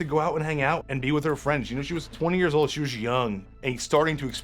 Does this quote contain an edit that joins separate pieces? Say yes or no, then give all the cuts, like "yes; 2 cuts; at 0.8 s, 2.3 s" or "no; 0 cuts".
yes; 3 cuts; at 0.8 s, 2.1 s, 3.5 s